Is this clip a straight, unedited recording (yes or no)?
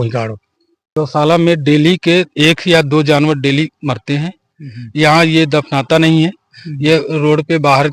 no